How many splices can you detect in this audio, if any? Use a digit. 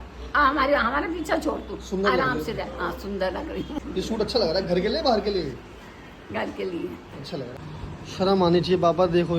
2